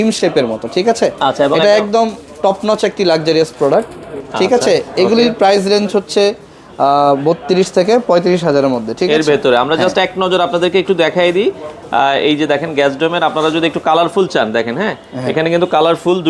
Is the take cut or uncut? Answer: uncut